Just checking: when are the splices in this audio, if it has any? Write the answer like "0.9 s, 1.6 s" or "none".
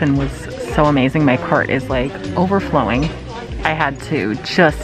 none

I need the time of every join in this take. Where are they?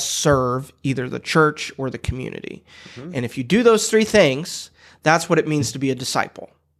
none

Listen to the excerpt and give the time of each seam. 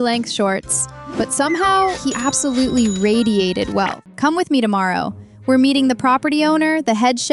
4.0 s

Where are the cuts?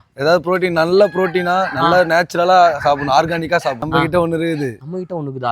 3.8 s

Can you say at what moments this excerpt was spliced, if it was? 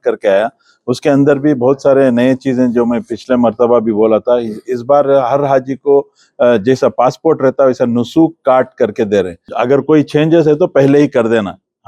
9.4 s

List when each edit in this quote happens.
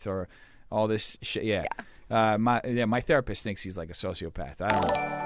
1.9 s

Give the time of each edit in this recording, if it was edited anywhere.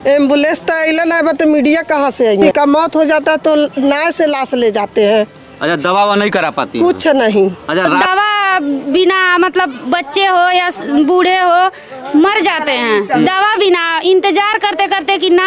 2.5 s, 8.0 s

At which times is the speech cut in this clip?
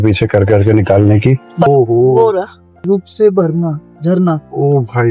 1.7 s

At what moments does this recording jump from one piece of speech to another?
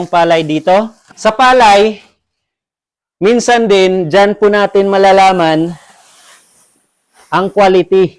1.0 s

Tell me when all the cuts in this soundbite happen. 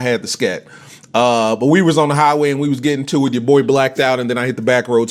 none

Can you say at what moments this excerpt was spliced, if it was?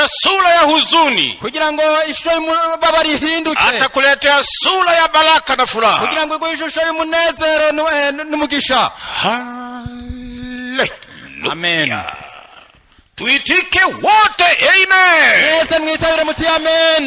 none

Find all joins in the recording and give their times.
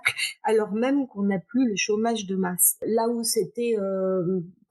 2.8 s

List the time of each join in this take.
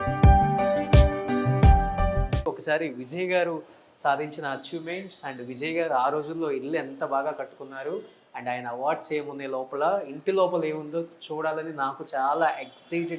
2.2 s

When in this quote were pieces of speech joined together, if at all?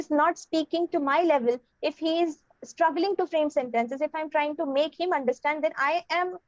none

